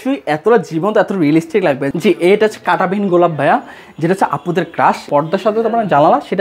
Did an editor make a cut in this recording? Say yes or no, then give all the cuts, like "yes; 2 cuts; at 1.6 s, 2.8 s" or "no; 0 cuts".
yes; 2 cuts; at 1.9 s, 5.0 s